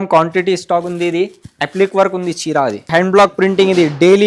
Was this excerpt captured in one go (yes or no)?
no